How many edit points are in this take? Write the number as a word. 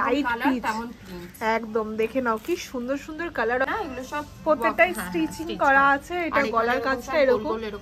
one